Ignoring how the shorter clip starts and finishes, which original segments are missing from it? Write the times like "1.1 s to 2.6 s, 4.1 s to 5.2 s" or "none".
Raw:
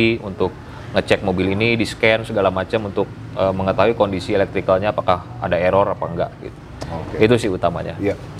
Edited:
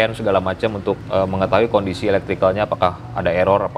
3.1 s to 3.3 s

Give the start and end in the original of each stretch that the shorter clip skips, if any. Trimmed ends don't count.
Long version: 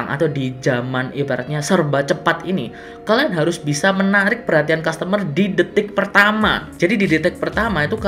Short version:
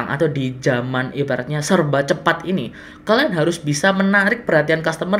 none

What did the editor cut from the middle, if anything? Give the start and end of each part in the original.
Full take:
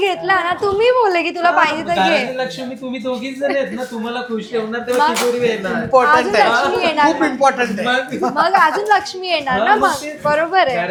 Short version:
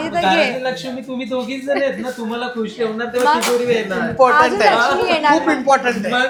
none

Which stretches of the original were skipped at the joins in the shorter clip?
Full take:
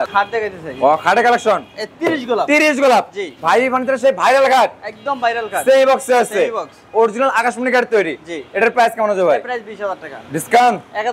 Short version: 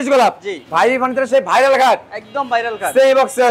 none

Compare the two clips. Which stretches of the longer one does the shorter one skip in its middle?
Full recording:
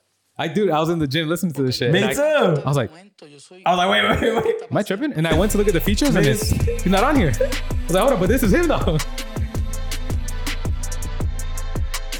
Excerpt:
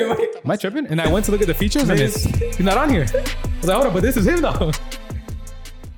none

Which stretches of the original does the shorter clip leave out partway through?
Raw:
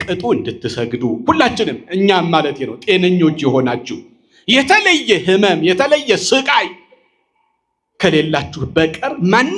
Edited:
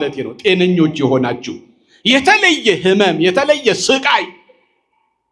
none

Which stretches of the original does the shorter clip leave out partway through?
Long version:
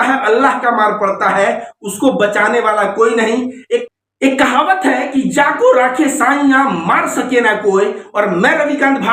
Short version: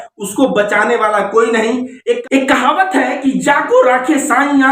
3.9 s to 4.1 s

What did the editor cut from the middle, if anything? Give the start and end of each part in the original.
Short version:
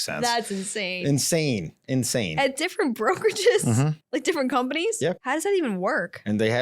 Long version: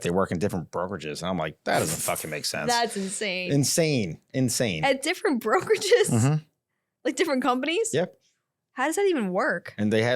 6.5 s to 6.9 s, 8.1 s to 8.7 s

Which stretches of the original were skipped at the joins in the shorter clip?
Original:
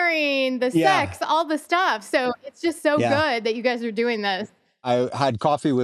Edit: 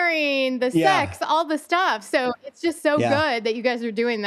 none

